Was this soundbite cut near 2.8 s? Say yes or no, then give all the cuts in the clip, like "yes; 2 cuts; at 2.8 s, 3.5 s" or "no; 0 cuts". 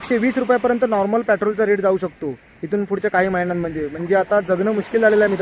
no; 0 cuts